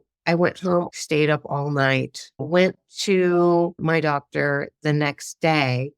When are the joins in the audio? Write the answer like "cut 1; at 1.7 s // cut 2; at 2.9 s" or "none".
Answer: cut 1; at 0.9 s // cut 2; at 2.3 s // cut 3; at 3.8 s